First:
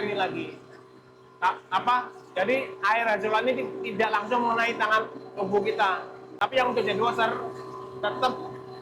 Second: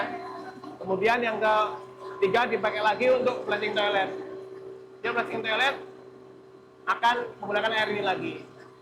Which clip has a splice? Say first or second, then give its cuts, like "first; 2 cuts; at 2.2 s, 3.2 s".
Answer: first; 1 cut; at 6.3 s